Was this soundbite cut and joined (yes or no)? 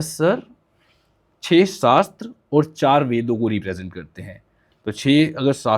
no